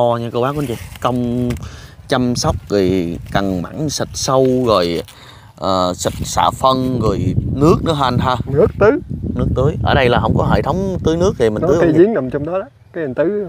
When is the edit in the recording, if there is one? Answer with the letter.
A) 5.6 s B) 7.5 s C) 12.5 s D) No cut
D